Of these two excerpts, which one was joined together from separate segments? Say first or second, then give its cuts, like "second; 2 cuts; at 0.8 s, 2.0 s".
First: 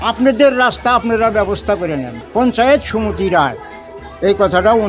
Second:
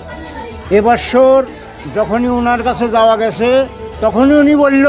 first; 1 cut; at 2.1 s